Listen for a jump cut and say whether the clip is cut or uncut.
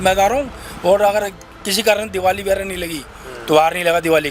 uncut